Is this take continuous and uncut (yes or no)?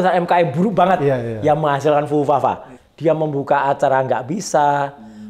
no